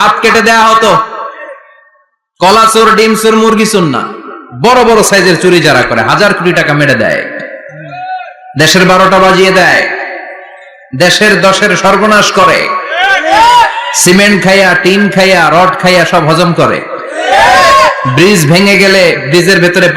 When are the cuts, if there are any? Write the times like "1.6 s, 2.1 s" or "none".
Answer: none